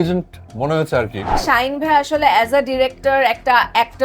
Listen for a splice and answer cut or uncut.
cut